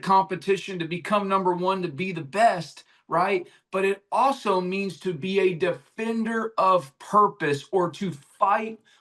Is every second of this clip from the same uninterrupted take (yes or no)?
yes